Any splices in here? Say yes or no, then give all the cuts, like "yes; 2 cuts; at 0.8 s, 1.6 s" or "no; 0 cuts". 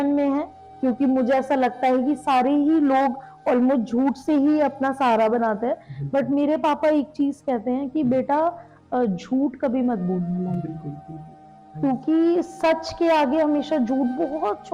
no; 0 cuts